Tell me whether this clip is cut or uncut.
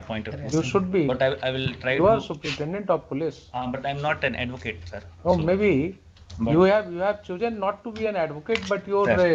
uncut